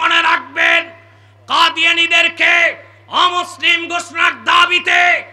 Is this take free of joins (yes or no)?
yes